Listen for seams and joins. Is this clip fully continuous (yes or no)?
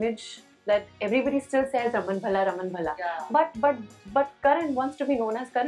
yes